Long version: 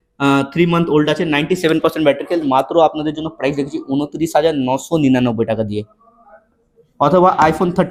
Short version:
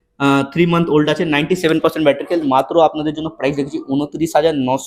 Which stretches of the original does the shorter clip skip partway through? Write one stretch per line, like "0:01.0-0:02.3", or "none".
none